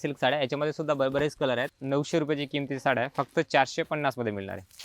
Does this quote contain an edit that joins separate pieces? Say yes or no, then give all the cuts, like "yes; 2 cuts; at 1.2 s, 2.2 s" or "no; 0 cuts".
yes; 1 cut; at 1.7 s